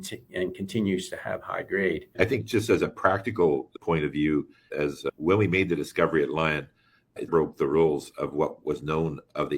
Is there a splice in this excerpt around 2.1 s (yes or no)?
yes